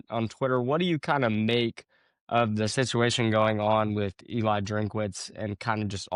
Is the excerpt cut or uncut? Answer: uncut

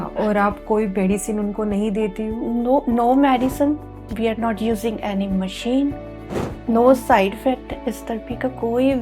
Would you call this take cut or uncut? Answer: uncut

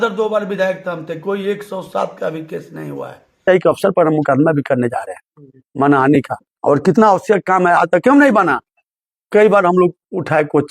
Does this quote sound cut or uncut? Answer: cut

